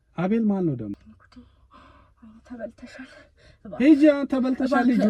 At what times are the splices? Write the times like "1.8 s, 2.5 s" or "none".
0.9 s